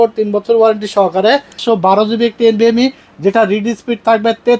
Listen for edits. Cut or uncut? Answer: cut